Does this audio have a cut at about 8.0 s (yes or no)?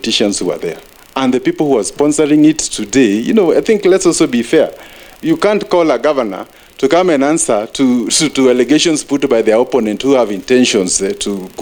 no